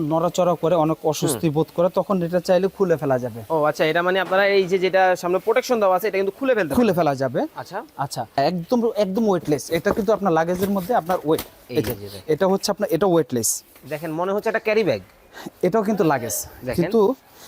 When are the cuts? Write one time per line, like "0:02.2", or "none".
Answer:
0:08.4